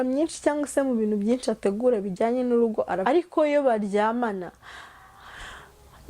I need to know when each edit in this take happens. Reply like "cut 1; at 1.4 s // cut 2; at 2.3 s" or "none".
cut 1; at 3.0 s